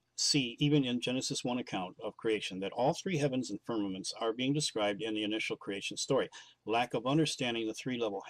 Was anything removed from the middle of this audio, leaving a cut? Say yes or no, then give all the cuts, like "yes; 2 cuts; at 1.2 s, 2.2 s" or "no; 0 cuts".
yes; 1 cut; at 6.9 s